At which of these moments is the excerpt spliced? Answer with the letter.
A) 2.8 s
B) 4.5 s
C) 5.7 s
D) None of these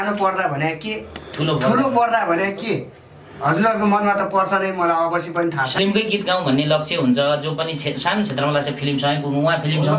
C